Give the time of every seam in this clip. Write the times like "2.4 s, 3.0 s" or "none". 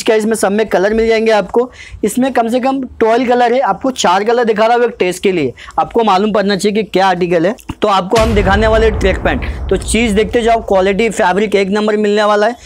7.7 s